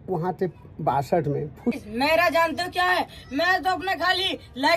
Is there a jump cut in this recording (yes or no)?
yes